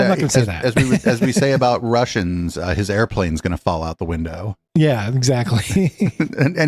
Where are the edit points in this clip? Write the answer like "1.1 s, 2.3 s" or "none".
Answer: none

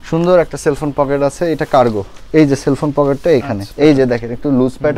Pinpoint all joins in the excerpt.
3.7 s

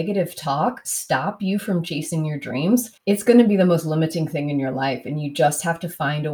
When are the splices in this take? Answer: 2.9 s

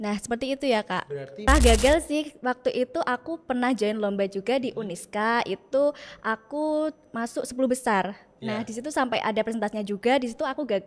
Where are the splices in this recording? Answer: 1.5 s

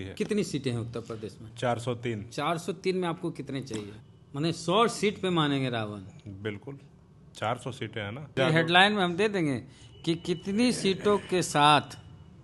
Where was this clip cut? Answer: 4.0 s, 8.4 s

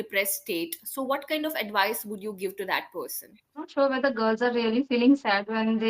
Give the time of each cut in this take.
3.7 s

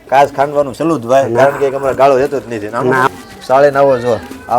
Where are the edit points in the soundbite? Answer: 3.0 s

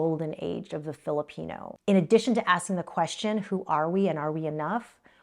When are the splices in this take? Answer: 1.7 s

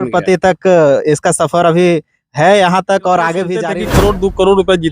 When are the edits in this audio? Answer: 3.7 s

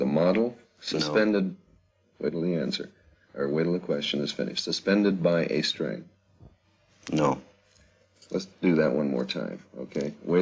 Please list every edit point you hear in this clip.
4.7 s

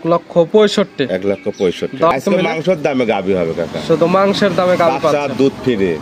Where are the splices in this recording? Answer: 2.1 s

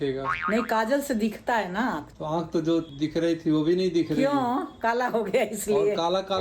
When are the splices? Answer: 2.1 s

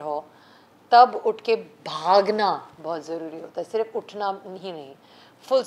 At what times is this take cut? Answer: none

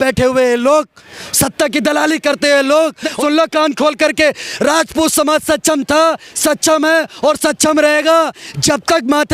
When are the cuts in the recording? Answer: 3.0 s

